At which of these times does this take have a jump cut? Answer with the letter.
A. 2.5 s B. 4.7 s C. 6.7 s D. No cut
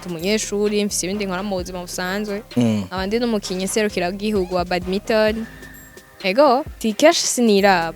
C